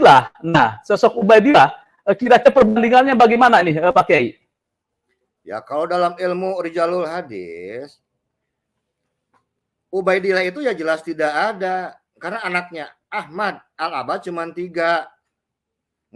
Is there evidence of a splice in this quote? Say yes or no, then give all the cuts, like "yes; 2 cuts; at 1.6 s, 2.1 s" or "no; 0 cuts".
no; 0 cuts